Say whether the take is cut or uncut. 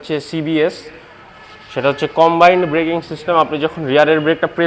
uncut